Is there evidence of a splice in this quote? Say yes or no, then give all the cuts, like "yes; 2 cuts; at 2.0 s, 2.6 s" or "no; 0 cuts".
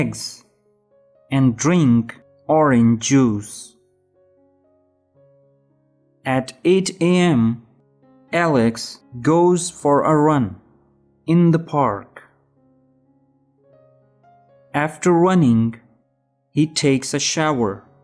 yes; 4 cuts; at 3.7 s, 6.2 s, 12.9 s, 14.7 s